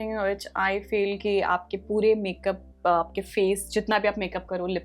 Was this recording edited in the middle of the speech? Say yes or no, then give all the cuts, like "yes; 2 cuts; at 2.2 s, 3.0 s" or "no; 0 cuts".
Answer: no; 0 cuts